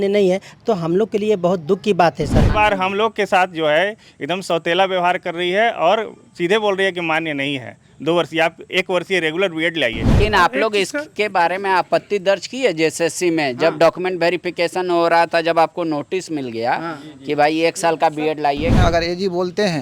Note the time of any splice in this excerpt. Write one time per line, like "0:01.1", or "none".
0:02.4
0:10.1
0:18.8